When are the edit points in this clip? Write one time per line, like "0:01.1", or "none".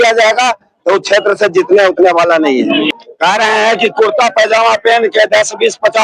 0:03.0